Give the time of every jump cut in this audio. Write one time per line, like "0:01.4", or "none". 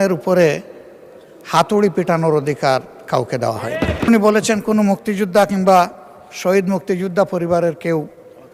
0:04.1